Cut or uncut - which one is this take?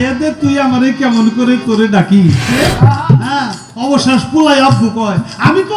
cut